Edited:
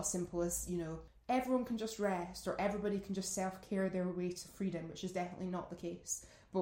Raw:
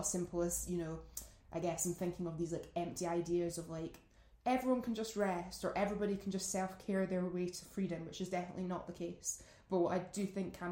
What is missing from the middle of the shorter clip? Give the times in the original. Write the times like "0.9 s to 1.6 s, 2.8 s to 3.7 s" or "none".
1.0 s to 4.2 s